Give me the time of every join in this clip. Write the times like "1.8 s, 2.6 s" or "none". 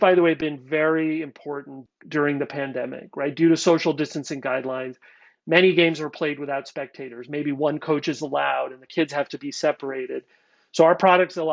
1.8 s